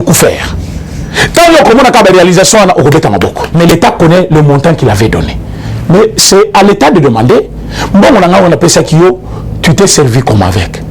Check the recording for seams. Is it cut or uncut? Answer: cut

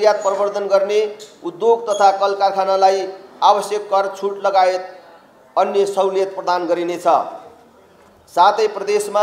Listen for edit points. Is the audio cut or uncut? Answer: uncut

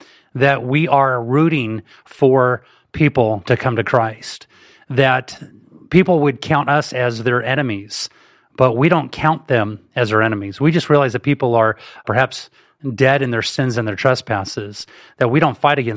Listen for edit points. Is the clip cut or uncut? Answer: cut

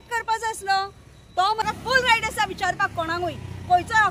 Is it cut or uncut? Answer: cut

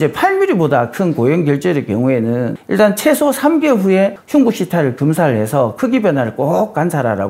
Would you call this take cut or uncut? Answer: uncut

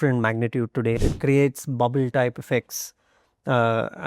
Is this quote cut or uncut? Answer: cut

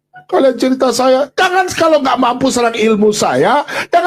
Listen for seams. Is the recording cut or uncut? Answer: uncut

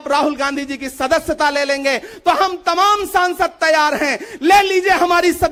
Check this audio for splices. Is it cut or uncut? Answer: uncut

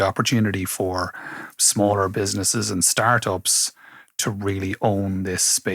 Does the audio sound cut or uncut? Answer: uncut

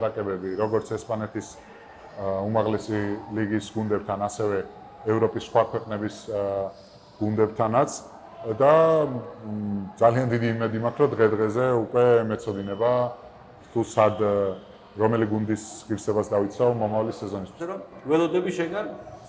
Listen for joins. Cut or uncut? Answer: cut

